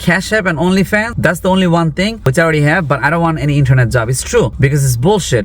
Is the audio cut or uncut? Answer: cut